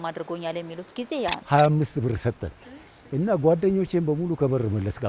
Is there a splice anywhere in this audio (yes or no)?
yes